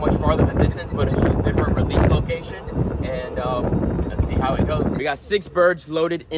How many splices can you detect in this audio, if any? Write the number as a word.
one